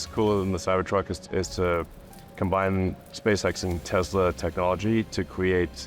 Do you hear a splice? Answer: no; 0 cuts

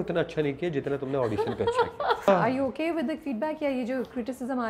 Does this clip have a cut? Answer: yes; 1 cut; at 2.3 s

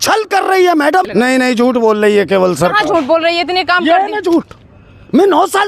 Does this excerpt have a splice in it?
yes; 1 cut; at 1.1 s

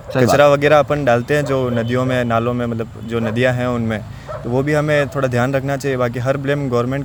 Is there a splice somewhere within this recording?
no; 0 cuts

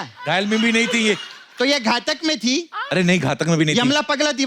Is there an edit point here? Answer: yes; 1 cut; at 2.8 s

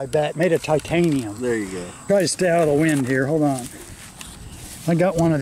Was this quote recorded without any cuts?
no; 1 cut; at 1.9 s

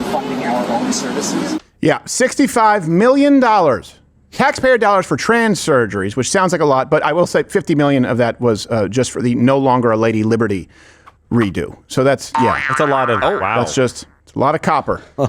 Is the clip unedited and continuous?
yes; 0 cuts

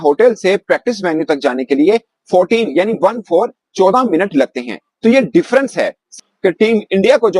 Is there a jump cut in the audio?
yes; 1 cut; at 6.2 s

